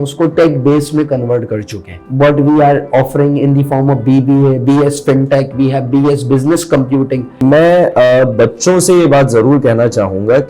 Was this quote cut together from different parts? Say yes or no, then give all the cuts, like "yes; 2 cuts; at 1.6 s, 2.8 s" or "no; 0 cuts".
yes; 2 cuts; at 2.0 s, 7.4 s